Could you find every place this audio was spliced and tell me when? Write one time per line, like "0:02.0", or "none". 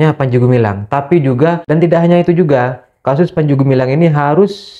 0:01.6